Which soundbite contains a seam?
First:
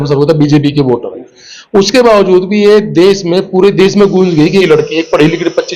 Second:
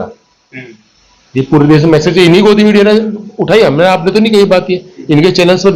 first; 1 cut; at 4.6 s

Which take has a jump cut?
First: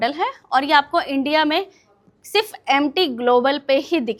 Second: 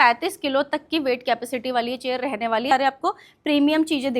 second; 1 cut; at 2.7 s

